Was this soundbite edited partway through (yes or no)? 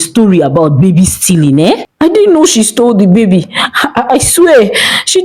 yes